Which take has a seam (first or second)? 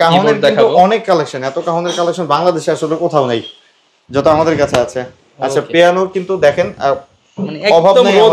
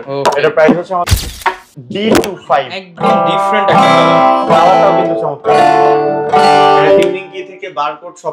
second